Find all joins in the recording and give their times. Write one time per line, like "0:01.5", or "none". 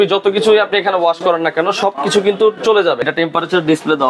0:03.0